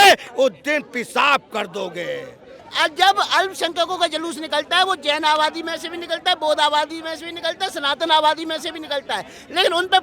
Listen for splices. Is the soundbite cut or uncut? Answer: cut